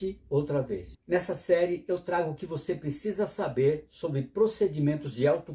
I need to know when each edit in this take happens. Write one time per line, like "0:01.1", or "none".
0:00.9